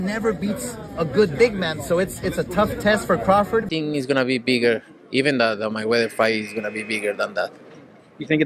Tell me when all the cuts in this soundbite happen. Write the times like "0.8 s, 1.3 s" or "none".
3.7 s

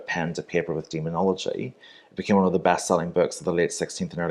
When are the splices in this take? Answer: none

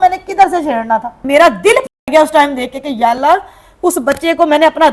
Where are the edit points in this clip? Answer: 1.2 s

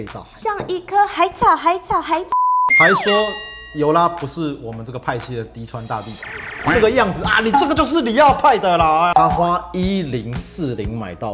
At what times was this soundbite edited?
9.1 s

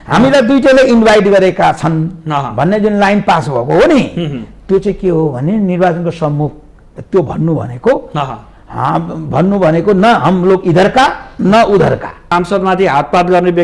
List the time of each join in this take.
12.3 s

